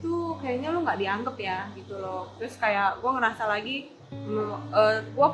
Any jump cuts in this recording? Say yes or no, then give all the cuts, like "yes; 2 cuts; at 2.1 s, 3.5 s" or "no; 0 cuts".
no; 0 cuts